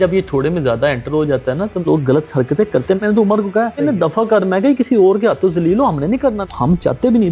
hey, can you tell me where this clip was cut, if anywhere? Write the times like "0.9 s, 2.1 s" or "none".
1.8 s, 3.0 s, 3.8 s, 6.4 s